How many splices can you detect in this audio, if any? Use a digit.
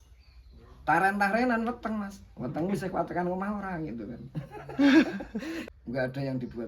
1